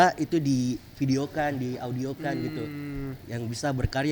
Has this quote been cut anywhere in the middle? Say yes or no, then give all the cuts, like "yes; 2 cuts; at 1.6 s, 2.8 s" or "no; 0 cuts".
no; 0 cuts